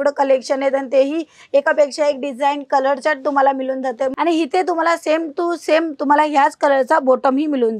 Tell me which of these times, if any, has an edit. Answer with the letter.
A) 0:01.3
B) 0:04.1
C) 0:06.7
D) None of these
B